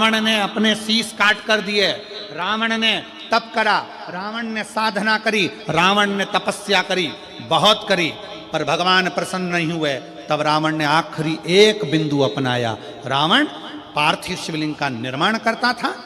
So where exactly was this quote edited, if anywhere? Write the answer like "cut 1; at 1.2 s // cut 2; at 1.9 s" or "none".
none